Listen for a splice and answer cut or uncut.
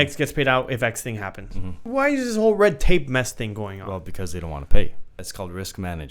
cut